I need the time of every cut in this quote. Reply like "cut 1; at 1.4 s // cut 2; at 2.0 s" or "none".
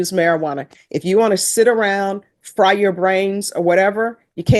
none